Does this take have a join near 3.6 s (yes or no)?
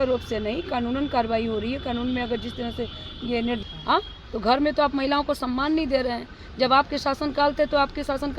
yes